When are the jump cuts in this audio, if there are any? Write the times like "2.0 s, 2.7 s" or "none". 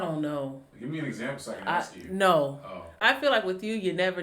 3.0 s